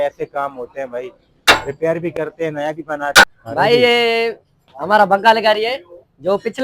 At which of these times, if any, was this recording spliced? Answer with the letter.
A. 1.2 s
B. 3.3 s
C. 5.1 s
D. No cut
B